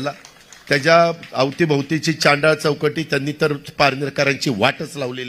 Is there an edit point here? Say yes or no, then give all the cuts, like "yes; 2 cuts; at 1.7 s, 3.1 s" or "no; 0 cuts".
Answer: no; 0 cuts